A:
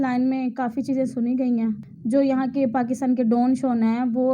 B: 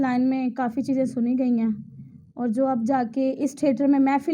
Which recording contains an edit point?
A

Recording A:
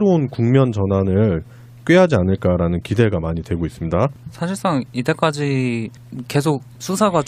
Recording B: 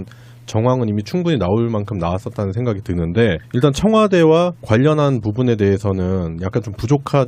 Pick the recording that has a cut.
B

